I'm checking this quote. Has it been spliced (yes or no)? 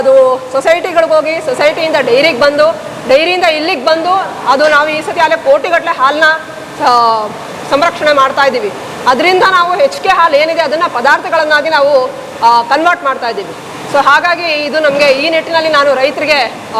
no